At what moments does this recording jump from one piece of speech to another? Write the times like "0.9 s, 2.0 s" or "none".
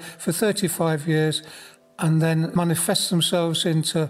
2.5 s